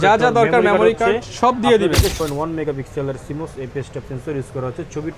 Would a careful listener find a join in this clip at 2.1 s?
yes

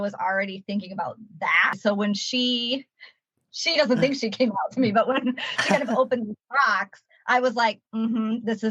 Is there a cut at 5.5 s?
no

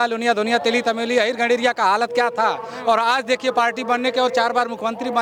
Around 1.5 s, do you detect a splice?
no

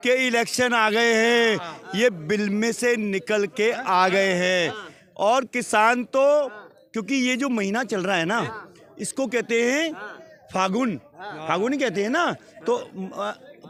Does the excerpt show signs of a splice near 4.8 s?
no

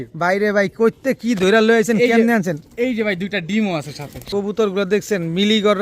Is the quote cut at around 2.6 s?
no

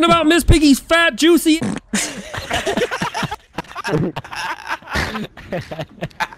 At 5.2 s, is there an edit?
no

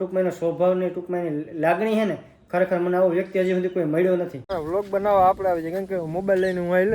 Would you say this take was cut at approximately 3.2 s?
no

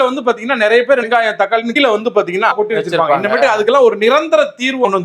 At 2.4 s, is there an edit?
no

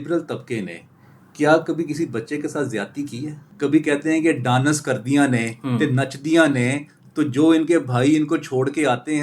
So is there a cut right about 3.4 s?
yes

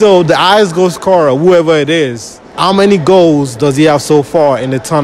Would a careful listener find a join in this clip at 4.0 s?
no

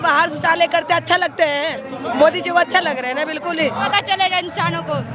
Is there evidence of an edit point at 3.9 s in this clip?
yes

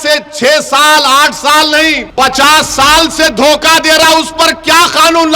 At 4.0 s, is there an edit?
no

